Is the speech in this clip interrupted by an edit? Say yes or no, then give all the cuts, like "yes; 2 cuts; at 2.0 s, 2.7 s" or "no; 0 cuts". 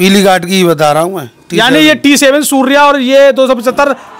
no; 0 cuts